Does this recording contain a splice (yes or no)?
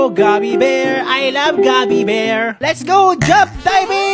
yes